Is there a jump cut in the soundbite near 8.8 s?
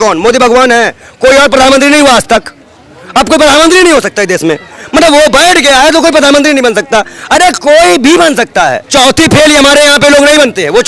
yes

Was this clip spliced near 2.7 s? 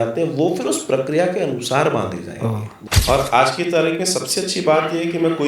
yes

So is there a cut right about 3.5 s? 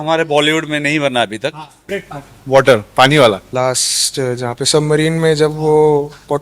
yes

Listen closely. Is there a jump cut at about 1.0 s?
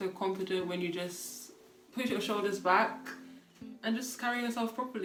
no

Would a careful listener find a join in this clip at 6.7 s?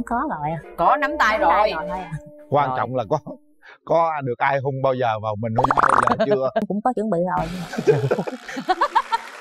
yes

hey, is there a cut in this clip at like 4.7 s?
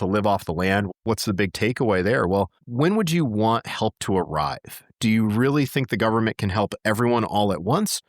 no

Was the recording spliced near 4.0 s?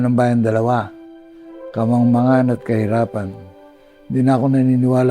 yes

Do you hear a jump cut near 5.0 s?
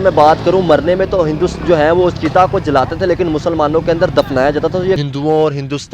yes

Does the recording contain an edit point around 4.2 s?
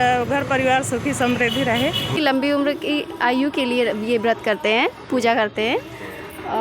no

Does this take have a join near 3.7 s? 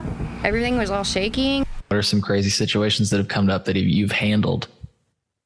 no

